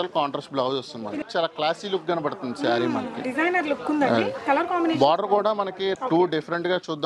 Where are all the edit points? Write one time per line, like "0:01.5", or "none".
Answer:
0:01.2
0:06.0